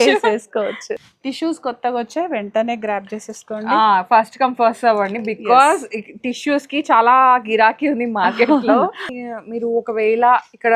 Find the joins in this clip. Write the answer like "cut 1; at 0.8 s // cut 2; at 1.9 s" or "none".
cut 1; at 0.9 s // cut 2; at 9.0 s